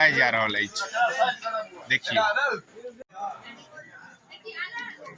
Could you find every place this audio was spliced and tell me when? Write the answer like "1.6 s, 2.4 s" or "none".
3.0 s